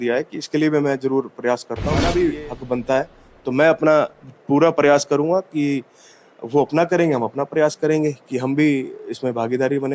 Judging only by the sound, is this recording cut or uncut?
cut